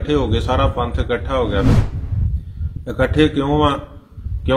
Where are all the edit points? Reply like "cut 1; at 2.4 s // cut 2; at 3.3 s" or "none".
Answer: cut 1; at 1.7 s